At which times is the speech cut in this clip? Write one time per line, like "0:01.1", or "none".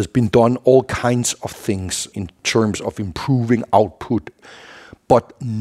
0:02.1
0:04.4

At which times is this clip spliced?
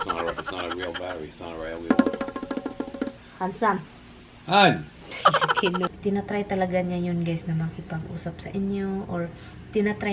0:03.2
0:05.9

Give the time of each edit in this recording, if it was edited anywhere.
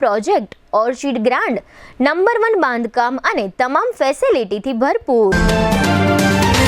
0:05.3

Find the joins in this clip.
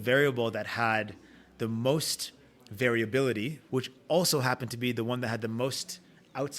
0:03.6

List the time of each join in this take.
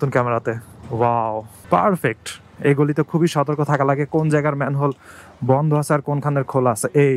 0:02.5

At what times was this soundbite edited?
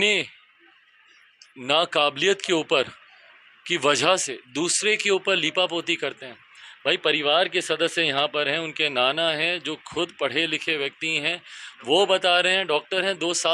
none

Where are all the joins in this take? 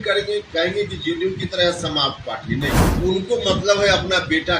0:02.8

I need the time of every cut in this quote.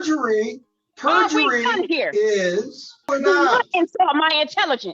0:03.1

